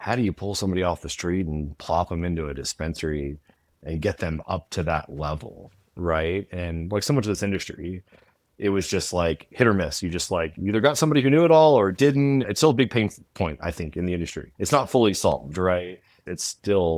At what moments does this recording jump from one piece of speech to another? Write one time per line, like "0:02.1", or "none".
0:12.5
0:14.4